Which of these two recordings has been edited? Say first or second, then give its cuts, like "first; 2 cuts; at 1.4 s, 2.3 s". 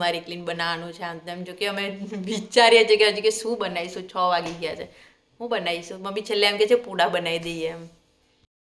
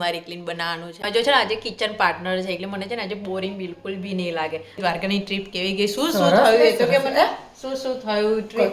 second; 2 cuts; at 1.0 s, 4.8 s